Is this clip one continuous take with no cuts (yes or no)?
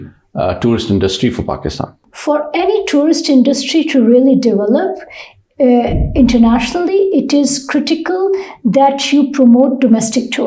no